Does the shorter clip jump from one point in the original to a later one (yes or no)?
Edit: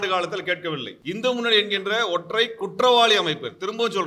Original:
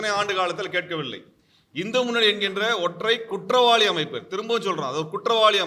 yes